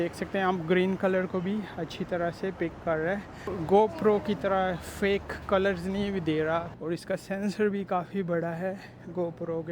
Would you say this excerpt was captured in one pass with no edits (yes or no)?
no